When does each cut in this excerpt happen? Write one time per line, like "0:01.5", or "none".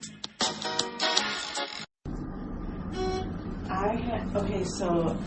0:01.9